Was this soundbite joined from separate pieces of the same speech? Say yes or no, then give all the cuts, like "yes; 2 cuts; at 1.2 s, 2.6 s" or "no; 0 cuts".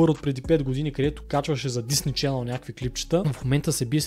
yes; 1 cut; at 1.2 s